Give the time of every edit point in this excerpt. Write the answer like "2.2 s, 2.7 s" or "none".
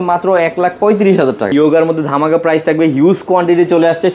1.5 s